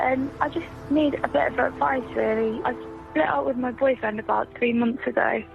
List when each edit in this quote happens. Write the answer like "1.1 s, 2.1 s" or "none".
2.6 s